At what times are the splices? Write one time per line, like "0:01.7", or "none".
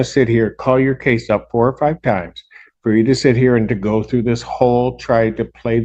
none